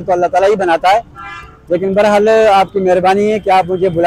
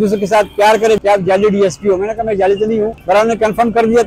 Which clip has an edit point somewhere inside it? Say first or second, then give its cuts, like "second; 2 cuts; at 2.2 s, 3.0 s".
second; 2 cuts; at 1.0 s, 3.0 s